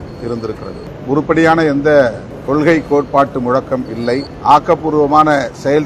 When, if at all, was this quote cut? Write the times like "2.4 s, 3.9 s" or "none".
0.9 s, 2.3 s, 4.3 s